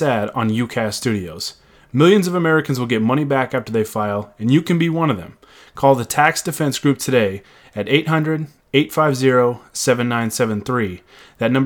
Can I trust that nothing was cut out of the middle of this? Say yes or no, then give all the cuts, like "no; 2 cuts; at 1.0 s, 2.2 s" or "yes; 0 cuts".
yes; 0 cuts